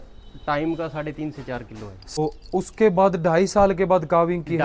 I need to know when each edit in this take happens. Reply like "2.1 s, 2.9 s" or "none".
2.2 s